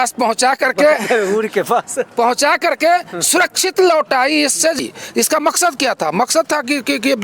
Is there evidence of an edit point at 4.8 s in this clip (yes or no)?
yes